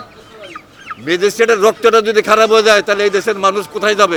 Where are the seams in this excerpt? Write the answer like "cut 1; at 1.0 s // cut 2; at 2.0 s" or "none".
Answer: none